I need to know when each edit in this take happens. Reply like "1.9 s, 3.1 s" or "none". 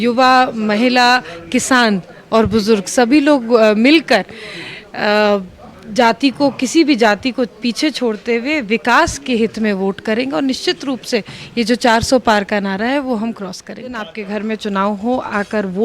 14.1 s

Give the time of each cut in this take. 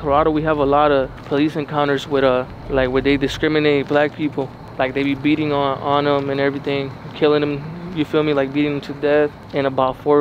none

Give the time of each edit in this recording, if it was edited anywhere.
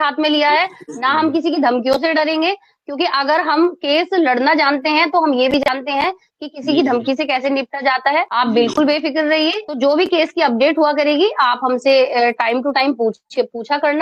none

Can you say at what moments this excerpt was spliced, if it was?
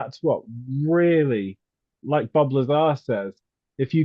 2.0 s

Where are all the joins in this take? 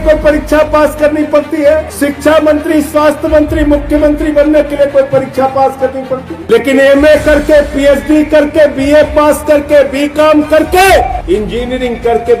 1.9 s, 6.3 s, 11.2 s

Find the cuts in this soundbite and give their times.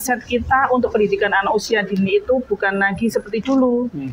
none

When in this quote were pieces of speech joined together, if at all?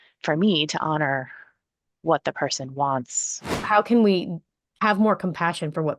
3.6 s

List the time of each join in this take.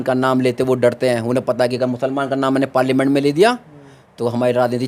none

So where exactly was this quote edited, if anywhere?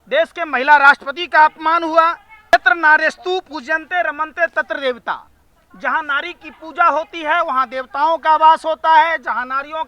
2.5 s

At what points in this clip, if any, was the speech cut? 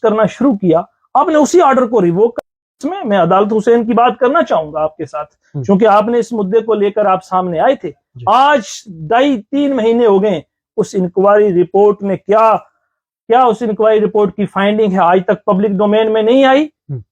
2.9 s

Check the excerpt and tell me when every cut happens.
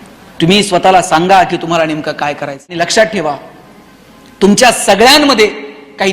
2.7 s

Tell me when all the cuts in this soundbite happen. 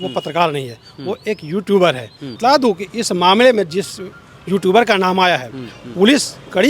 2.4 s

